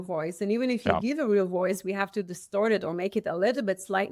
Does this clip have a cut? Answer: no; 0 cuts

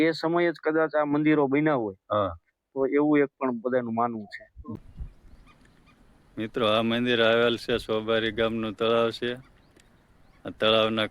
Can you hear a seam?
yes; 1 cut; at 4.8 s

